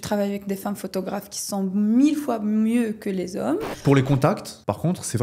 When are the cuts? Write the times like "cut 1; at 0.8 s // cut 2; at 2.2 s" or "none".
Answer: cut 1; at 3.7 s